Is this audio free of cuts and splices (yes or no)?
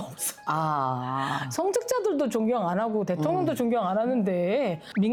yes